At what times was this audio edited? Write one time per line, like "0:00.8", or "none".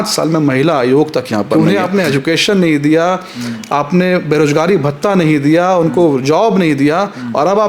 0:01.5